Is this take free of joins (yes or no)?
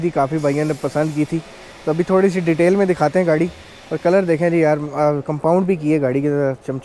yes